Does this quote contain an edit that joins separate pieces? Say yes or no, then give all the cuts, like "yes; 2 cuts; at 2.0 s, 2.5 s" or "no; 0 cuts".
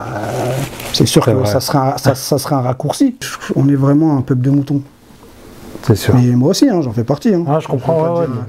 yes; 1 cut; at 3.4 s